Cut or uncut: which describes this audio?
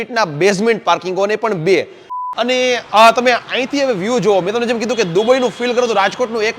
cut